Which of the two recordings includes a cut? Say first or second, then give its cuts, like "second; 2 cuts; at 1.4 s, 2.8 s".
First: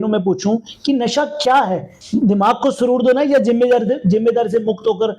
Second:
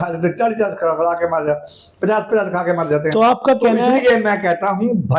first; 1 cut; at 1.9 s